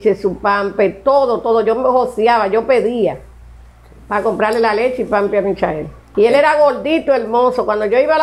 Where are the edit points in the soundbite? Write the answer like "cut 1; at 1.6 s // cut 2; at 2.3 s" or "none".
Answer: cut 1; at 6.0 s

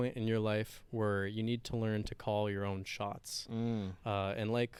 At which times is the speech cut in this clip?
none

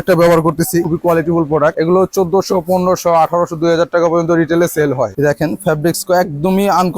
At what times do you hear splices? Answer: cut 1; at 0.9 s // cut 2; at 1.7 s // cut 3; at 5.1 s

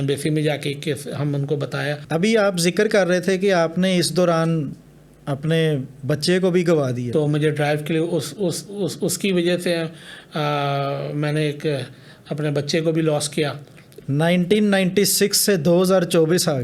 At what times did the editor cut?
cut 1; at 2.0 s // cut 2; at 7.1 s // cut 3; at 13.8 s

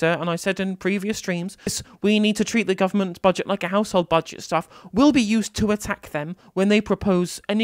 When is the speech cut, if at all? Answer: cut 1; at 1.8 s

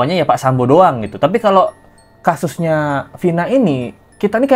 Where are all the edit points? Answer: none

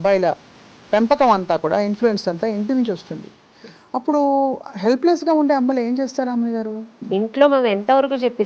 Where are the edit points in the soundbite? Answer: cut 1; at 7.0 s

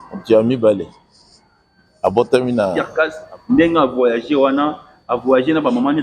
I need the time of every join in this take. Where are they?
cut 1; at 2.8 s

